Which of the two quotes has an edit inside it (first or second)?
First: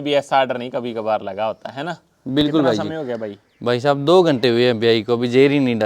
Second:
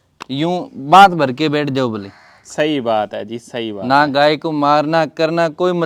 first